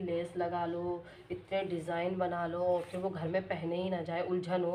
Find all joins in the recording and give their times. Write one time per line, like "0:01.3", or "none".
none